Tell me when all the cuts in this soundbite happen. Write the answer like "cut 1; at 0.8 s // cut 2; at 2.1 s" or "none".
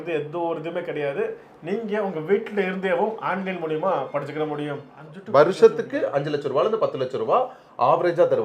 cut 1; at 4.9 s